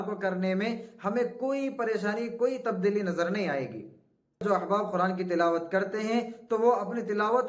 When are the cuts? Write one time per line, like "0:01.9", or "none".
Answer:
0:04.4

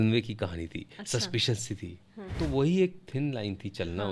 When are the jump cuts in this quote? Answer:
0:02.3

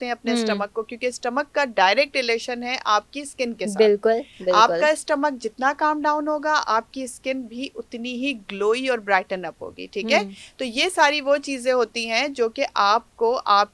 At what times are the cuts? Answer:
none

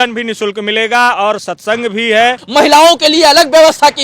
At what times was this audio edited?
0:02.4

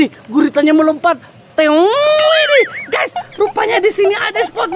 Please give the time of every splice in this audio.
none

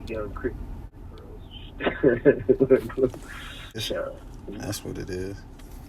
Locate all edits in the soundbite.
0:03.8

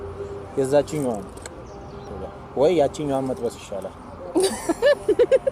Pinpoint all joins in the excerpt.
0:02.1

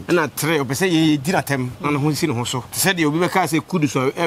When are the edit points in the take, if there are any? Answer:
0:02.6

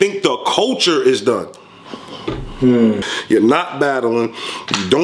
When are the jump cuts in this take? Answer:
0:03.0

